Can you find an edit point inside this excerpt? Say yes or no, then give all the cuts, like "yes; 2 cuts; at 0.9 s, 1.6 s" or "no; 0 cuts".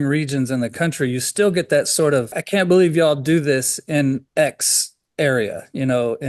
yes; 1 cut; at 2.4 s